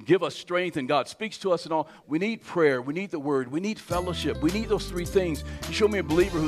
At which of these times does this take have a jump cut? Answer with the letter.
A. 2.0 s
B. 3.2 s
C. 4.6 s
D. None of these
A